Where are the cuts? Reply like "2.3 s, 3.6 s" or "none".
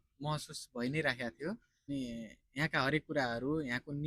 1.9 s